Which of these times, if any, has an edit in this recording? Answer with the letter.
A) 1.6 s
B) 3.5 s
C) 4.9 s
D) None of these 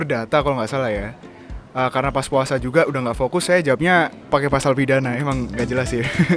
D